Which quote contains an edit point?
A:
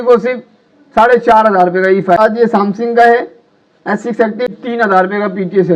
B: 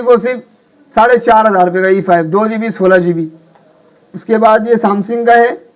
A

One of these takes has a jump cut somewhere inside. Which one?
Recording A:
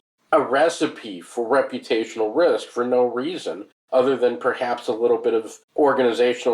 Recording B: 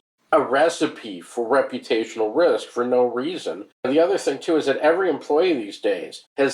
B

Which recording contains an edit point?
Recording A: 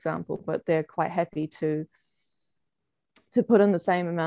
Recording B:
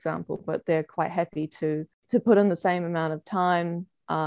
B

